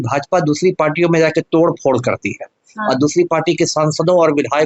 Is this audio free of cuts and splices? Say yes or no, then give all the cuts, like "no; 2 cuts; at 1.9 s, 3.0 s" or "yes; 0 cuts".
yes; 0 cuts